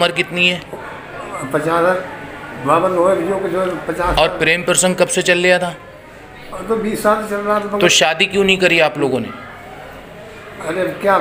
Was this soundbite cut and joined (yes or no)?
no